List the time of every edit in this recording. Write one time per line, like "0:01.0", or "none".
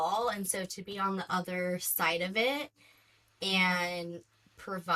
none